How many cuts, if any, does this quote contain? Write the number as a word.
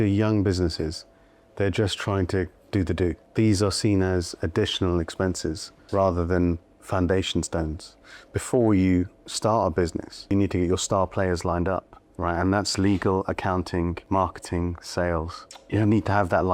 six